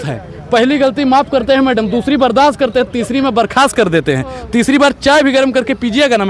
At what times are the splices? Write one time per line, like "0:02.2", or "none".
none